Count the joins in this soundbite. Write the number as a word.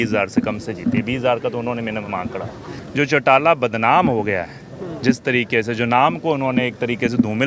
one